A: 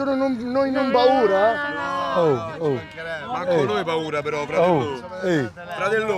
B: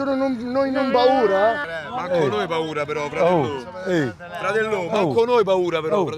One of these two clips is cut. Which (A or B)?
B